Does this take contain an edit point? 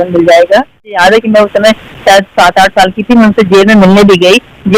yes; 1 cut; at 1.0 s

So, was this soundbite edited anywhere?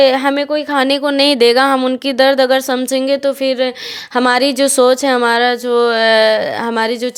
no; 0 cuts

